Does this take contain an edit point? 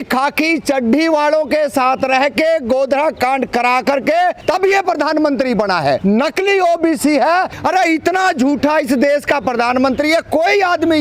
yes; 3 cuts; at 4.4 s, 6.0 s, 7.5 s

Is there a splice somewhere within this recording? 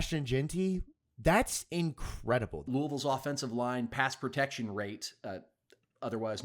yes; 1 cut; at 2.6 s

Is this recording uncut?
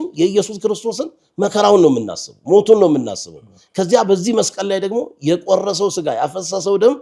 yes; 0 cuts

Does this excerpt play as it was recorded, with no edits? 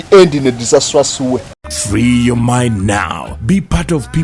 no; 1 cut; at 1.7 s

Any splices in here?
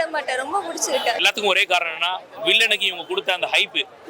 yes; 1 cut; at 1.2 s

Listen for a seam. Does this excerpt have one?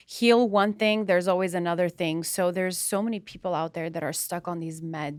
no; 0 cuts

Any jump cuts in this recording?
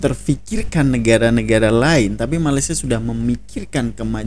no; 0 cuts

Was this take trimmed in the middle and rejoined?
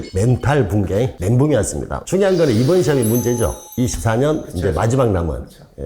yes; 1 cut; at 2.0 s

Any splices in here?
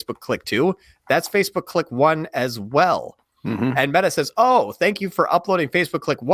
no; 0 cuts

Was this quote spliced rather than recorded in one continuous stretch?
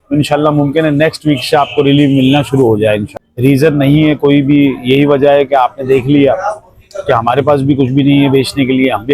yes; 1 cut; at 3.1 s

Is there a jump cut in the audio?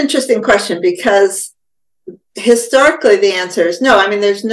no; 0 cuts

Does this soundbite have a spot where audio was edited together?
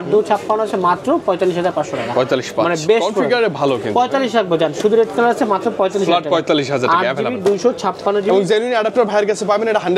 no; 0 cuts

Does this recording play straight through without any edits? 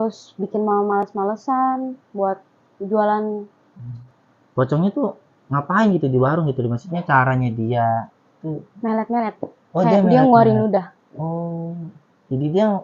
no; 1 cut; at 3.9 s

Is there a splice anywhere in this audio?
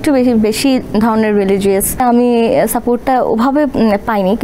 yes; 1 cut; at 2.0 s

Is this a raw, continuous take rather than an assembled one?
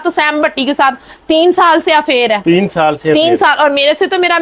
yes; 0 cuts

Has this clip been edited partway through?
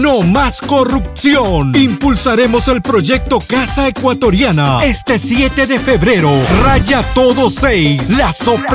no; 0 cuts

